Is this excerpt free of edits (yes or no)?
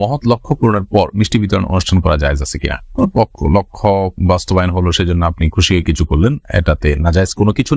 yes